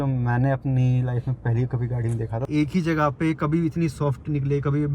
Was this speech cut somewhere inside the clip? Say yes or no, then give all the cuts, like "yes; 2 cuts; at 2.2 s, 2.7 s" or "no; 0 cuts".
yes; 1 cut; at 2.4 s